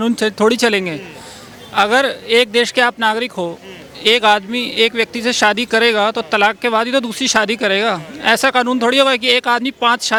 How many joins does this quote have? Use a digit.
0